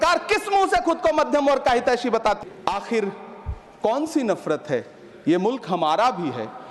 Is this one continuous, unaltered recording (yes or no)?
no